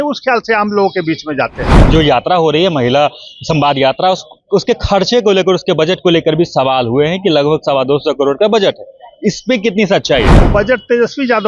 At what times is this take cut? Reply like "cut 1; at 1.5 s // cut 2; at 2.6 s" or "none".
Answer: cut 1; at 1.8 s // cut 2; at 10.4 s

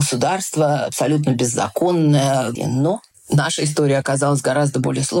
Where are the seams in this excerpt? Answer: cut 1; at 2.5 s

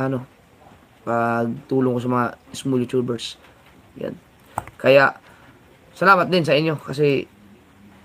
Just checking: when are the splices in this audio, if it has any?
none

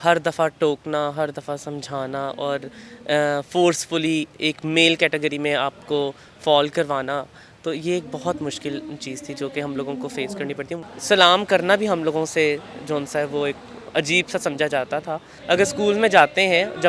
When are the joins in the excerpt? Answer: cut 1; at 10.6 s // cut 2; at 15.3 s

